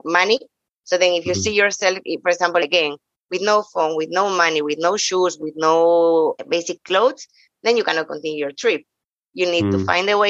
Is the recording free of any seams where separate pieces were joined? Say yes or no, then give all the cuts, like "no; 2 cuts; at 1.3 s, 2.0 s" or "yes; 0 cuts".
no; 2 cuts; at 2.6 s, 6.4 s